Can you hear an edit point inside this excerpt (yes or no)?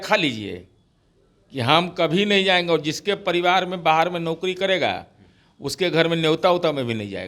no